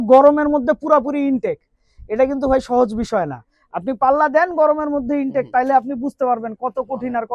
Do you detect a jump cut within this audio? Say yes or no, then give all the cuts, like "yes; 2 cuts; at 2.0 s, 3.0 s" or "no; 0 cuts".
no; 0 cuts